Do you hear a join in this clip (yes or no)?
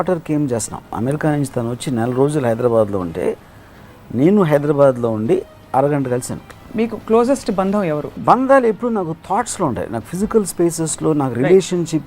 yes